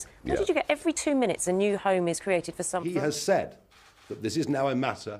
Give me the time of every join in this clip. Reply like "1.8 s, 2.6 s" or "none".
2.8 s